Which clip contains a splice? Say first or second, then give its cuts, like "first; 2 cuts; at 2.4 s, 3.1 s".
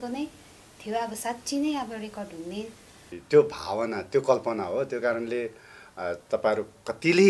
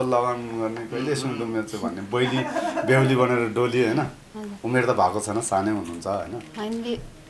first; 1 cut; at 3.1 s